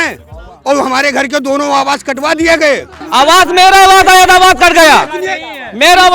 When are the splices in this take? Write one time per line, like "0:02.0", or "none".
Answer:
0:03.0